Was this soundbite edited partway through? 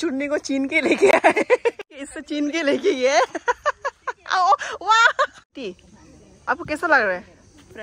yes; 2 cuts; at 1.8 s, 5.5 s

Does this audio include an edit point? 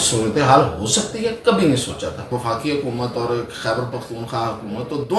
yes; 1 cut; at 2.3 s

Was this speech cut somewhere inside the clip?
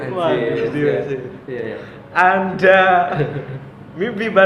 no; 0 cuts

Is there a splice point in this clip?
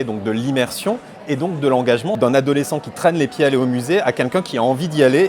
yes; 1 cut; at 2.2 s

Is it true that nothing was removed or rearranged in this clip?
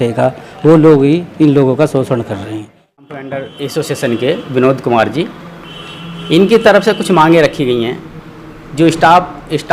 no; 1 cut; at 3.0 s

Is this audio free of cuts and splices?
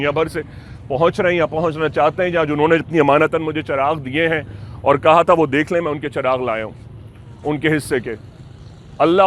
yes; 0 cuts

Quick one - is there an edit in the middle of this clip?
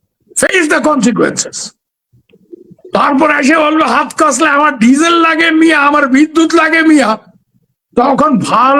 no; 0 cuts

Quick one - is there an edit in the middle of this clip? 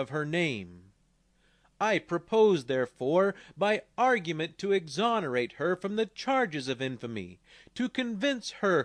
yes; 1 cut; at 6.2 s

